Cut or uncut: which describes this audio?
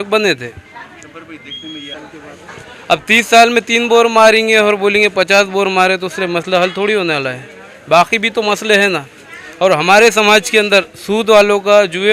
cut